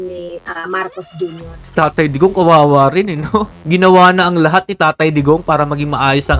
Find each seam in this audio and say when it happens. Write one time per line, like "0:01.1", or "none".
0:01.6